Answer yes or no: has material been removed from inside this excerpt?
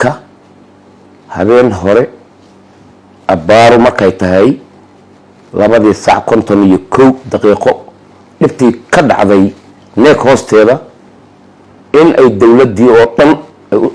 no